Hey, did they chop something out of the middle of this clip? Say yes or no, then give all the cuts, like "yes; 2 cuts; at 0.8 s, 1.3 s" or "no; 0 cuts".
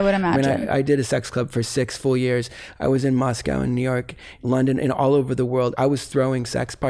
no; 0 cuts